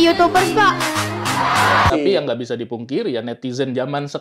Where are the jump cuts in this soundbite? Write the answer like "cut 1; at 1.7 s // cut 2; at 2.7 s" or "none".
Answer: cut 1; at 1.9 s